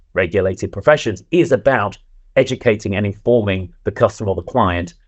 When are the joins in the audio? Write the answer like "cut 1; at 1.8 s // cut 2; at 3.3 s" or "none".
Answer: none